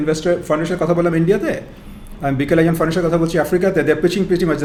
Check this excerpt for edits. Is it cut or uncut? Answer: uncut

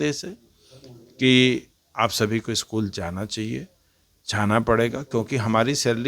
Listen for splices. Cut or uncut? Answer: uncut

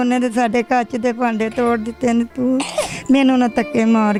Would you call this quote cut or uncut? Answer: uncut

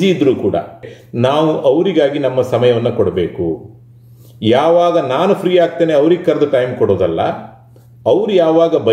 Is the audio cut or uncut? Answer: cut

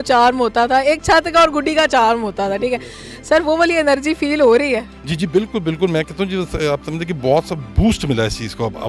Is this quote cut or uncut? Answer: uncut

